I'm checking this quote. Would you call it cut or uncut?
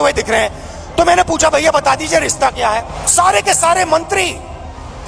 cut